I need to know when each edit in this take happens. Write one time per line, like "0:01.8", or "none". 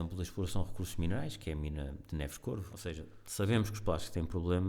0:02.8